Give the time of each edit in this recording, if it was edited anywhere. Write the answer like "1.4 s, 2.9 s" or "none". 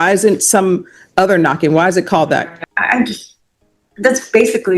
2.6 s

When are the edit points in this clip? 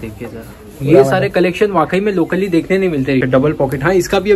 3.2 s

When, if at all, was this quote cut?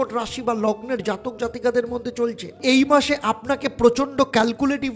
2.6 s

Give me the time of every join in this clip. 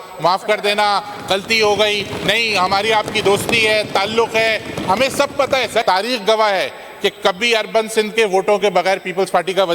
5.8 s

